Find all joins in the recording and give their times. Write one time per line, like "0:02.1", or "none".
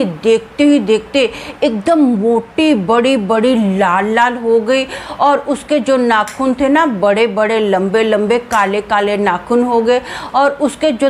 none